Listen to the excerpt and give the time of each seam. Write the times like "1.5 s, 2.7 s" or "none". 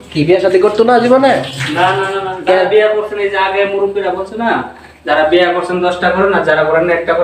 none